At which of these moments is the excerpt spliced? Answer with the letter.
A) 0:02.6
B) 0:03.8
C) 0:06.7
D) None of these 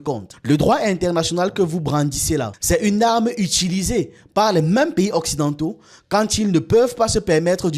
A